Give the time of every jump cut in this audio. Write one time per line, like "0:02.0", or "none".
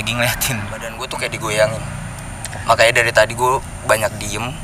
0:01.1

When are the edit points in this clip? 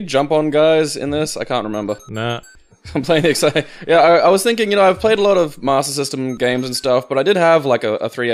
none

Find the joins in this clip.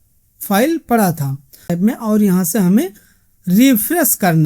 0:01.6

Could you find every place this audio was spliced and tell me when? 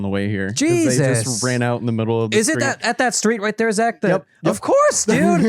none

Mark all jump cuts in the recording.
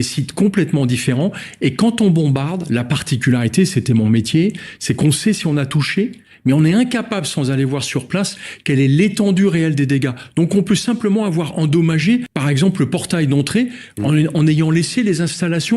0:12.3

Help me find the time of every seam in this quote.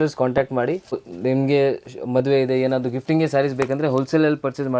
0:01.0

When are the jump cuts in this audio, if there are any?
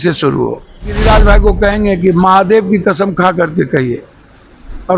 0:01.0

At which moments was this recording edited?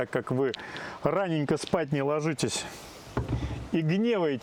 none

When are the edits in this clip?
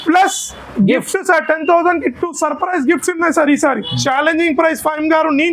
0:03.9

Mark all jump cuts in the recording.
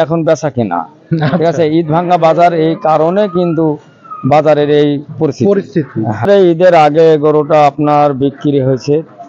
0:06.3

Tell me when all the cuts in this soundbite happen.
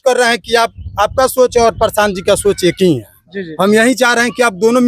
none

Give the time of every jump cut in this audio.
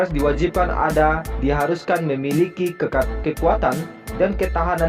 none

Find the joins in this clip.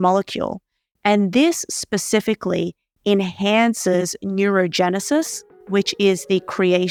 none

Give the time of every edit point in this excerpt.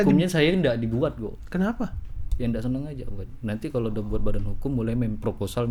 none

